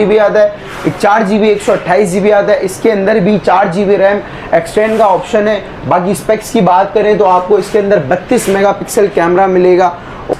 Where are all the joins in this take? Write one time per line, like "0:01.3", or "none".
none